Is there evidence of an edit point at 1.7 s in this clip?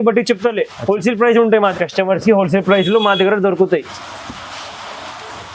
yes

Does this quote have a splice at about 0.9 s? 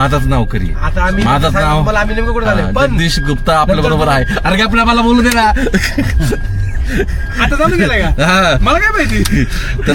no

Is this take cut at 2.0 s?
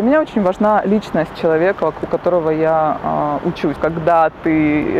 no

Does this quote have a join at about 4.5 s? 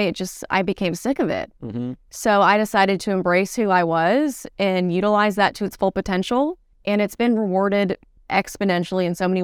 no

